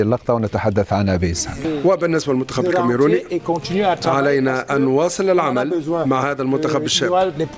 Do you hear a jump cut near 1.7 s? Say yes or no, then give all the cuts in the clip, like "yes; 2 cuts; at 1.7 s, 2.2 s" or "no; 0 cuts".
yes; 1 cut; at 1.7 s